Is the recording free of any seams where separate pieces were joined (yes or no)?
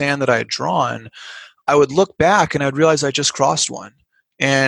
yes